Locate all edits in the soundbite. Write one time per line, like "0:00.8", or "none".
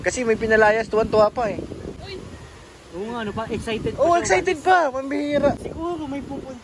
0:05.7